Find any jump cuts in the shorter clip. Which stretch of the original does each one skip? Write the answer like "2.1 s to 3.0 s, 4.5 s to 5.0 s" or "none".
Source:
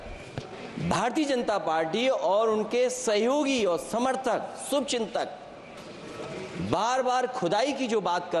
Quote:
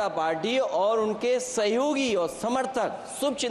none